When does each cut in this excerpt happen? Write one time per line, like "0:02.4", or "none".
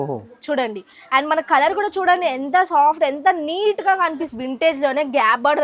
0:04.3